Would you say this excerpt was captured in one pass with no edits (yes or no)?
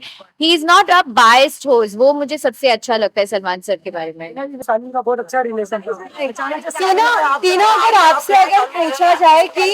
yes